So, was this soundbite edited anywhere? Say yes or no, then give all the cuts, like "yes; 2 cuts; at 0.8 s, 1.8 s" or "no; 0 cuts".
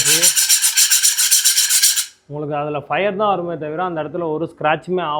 no; 0 cuts